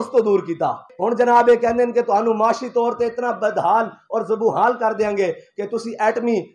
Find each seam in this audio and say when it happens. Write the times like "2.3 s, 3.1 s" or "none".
0.9 s

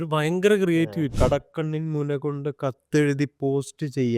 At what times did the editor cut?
1.1 s

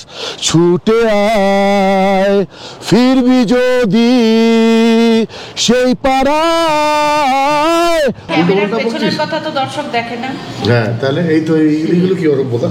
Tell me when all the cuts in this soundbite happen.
8.2 s

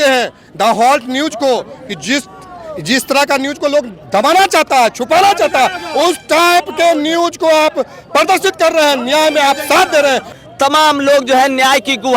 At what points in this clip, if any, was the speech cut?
10.4 s

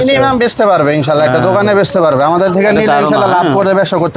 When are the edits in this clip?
none

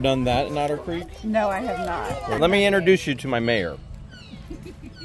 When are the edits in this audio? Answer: 2.4 s

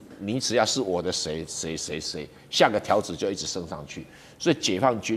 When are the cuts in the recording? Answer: none

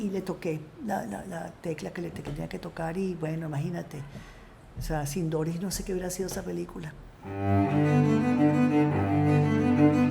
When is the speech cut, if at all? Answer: 7.2 s

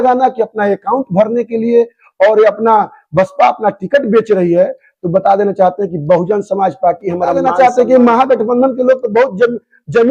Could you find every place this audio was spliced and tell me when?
7.4 s

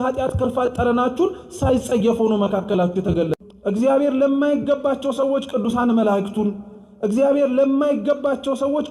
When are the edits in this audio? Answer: 3.3 s

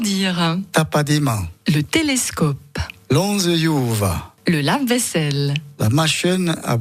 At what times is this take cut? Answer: 1.5 s, 4.3 s

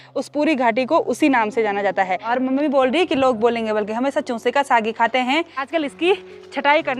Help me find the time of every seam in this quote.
2.2 s, 5.7 s

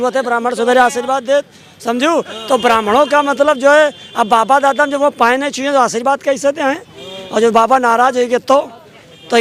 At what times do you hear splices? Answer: none

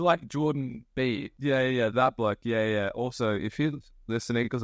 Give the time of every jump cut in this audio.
1.3 s

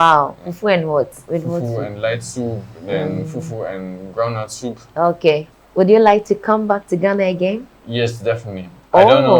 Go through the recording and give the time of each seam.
1.2 s, 5.6 s

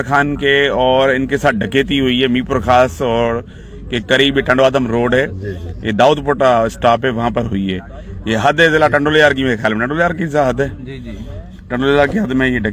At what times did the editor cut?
none

